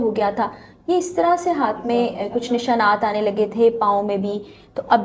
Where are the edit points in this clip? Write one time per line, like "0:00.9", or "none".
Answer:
none